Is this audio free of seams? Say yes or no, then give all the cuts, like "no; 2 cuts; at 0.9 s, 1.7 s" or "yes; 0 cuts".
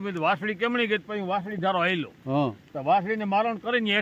yes; 0 cuts